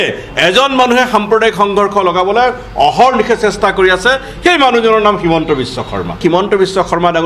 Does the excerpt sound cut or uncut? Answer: cut